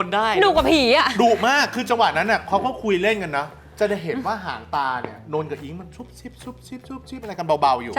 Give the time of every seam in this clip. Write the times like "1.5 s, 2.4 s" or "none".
none